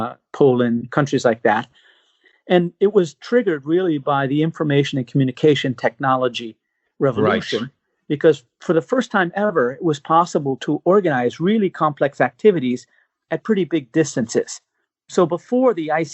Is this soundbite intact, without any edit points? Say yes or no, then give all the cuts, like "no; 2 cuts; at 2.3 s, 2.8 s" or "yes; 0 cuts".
no; 1 cut; at 8.6 s